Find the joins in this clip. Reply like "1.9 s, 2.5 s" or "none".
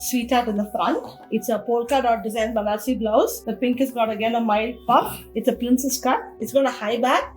1.2 s, 3.4 s, 6.3 s

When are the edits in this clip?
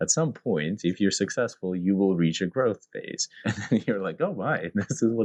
none

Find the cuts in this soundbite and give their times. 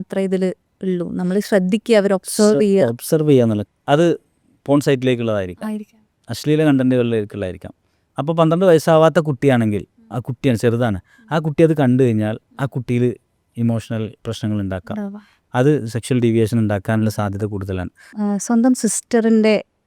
3.6 s, 18.1 s

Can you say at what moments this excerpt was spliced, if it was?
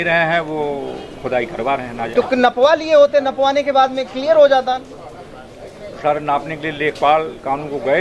none

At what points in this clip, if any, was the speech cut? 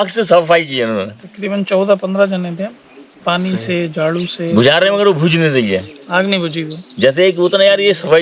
none

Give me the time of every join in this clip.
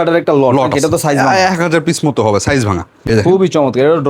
3.1 s

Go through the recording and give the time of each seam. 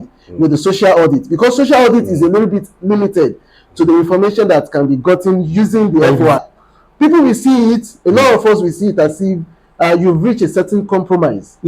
6.5 s

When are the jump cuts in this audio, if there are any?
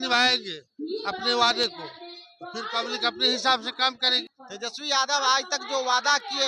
4.4 s

